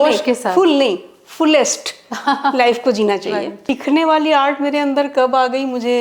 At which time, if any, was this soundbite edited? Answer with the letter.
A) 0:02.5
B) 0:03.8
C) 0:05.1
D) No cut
B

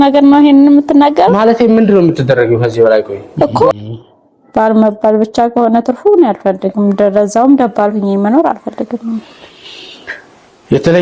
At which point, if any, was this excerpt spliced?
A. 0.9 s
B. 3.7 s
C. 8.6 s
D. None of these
B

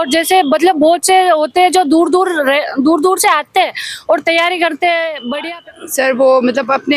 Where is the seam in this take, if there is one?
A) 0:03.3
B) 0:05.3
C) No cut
B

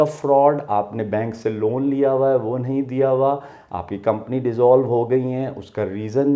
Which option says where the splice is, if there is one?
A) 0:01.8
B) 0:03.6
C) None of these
C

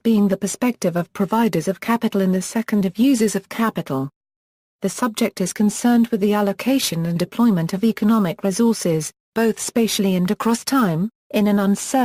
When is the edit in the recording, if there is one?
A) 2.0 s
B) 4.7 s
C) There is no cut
A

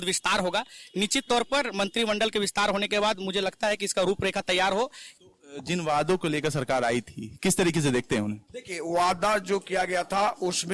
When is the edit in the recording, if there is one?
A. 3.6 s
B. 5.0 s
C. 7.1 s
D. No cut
B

